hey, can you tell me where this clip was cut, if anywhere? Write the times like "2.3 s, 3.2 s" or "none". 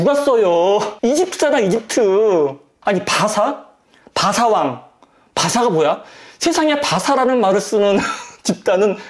0.9 s, 2.7 s

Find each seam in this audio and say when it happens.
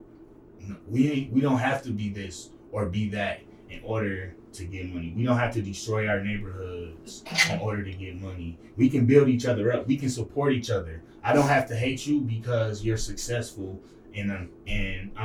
none

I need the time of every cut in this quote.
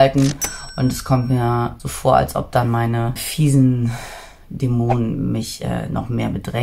1.9 s, 3.2 s

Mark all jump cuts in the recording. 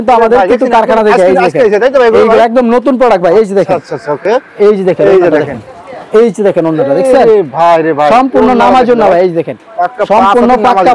none

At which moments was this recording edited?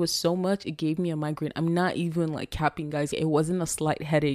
3.1 s

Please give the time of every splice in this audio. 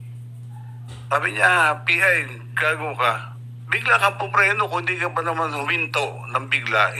none

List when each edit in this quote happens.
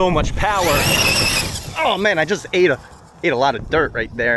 none

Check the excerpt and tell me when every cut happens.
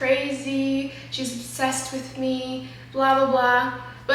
none

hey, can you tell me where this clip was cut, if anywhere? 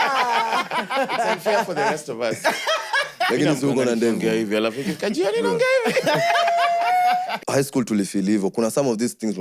7.4 s

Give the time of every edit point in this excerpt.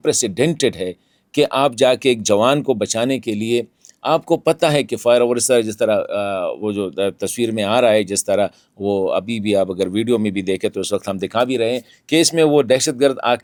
none

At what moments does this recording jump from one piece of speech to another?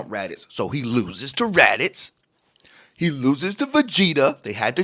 none

